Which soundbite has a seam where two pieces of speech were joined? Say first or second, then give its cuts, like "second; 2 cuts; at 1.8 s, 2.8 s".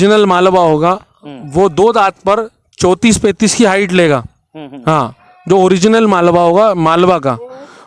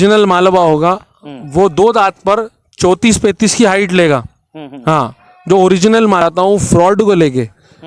second; 1 cut; at 6.2 s